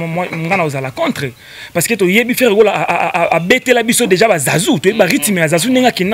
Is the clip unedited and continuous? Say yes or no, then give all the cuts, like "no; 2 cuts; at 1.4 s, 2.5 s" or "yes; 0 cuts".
yes; 0 cuts